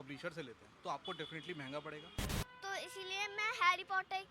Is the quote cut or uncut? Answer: cut